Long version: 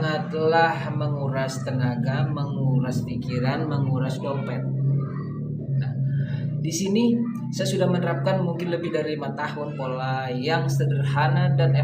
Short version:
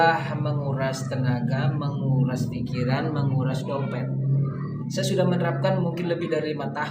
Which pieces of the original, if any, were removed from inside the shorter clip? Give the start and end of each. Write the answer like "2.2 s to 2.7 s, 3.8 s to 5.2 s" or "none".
5.4 s to 7.4 s